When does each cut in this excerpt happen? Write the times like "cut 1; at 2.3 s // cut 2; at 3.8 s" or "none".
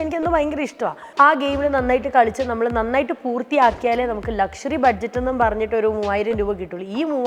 cut 1; at 1.0 s